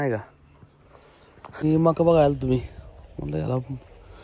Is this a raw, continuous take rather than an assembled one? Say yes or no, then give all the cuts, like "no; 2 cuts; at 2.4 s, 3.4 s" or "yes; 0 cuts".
no; 1 cut; at 1.6 s